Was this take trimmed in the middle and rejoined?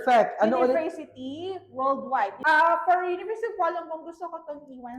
yes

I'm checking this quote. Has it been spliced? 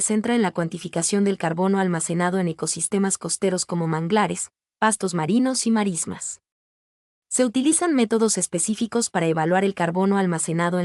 no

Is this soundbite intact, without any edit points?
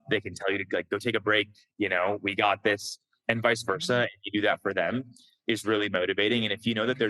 yes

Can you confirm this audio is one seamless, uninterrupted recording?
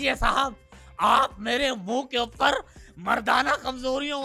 yes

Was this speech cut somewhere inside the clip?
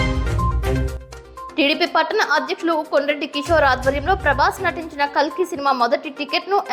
yes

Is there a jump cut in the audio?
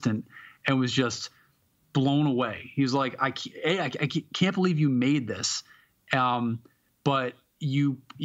no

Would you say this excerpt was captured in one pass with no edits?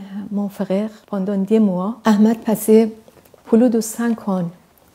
no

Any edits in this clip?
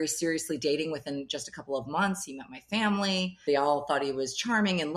no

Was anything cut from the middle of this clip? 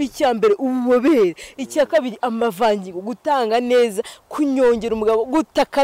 no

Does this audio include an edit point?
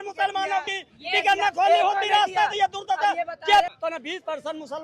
yes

